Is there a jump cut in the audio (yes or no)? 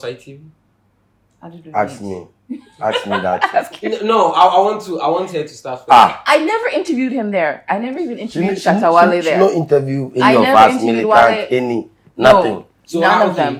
no